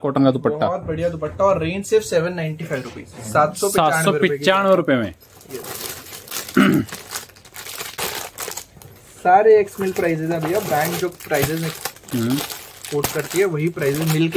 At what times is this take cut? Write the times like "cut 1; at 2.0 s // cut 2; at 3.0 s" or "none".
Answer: none